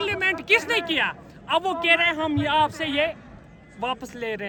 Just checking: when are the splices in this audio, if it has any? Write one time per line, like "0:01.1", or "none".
none